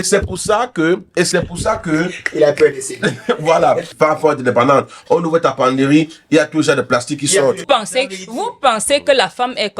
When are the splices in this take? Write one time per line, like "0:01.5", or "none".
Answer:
0:03.9
0:07.6